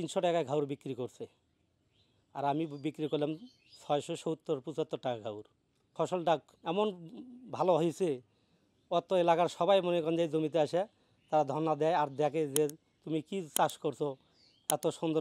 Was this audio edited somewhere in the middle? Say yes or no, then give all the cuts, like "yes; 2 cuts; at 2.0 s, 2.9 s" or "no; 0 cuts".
yes; 1 cut; at 5.9 s